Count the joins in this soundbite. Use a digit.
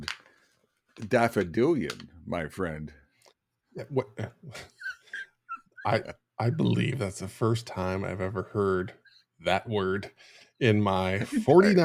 0